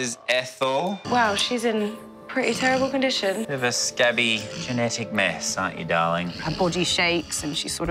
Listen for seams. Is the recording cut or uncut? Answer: cut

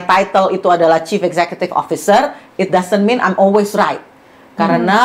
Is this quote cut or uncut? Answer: uncut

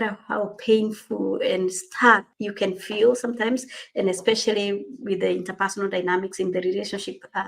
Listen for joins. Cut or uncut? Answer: uncut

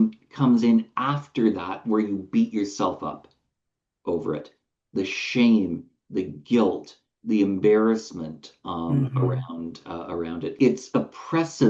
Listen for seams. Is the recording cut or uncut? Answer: cut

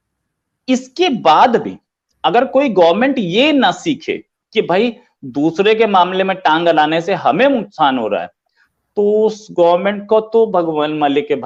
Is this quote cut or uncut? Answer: uncut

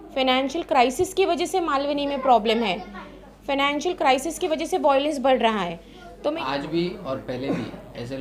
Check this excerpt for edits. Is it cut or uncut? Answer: cut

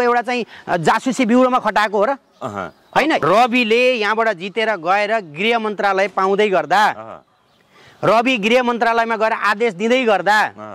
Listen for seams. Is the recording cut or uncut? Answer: cut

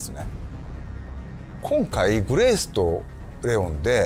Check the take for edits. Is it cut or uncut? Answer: uncut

